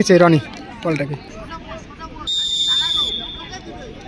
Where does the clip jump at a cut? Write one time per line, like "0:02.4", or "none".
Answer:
0:01.3